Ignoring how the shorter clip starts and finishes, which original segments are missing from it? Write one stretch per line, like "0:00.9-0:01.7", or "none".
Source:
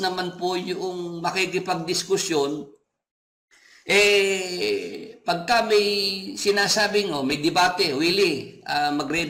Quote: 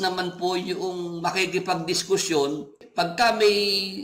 0:02.8-0:05.1